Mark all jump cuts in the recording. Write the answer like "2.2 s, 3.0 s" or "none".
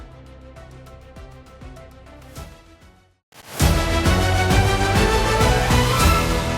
3.1 s